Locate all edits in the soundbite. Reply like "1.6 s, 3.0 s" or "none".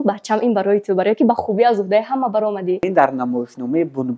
2.8 s